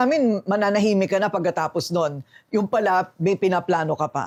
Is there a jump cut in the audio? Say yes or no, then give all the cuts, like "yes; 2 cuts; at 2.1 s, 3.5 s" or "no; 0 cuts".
no; 0 cuts